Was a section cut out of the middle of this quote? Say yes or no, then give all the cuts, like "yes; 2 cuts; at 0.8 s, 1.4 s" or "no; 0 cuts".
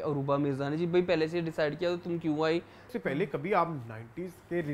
yes; 1 cut; at 2.8 s